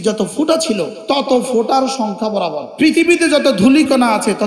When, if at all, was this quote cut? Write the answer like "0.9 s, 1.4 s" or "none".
1.0 s, 2.6 s